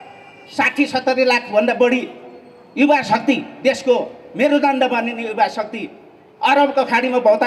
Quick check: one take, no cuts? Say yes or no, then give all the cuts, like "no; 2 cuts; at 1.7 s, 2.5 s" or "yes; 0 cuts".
yes; 0 cuts